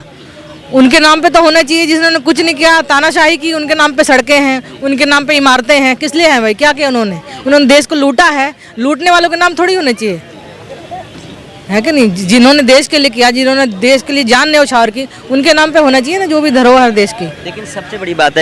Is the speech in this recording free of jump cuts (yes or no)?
yes